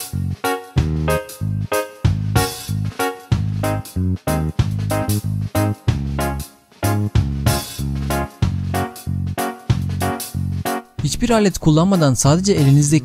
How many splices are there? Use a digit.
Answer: 1